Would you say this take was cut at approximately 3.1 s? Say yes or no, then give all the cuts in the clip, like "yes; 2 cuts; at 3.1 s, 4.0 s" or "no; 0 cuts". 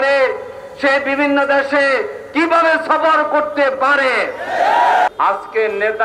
no; 1 cut; at 5.1 s